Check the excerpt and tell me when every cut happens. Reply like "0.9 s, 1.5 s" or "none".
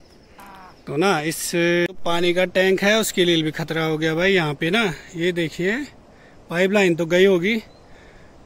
1.9 s